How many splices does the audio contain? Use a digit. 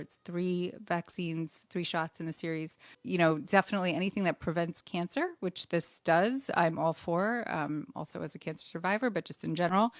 1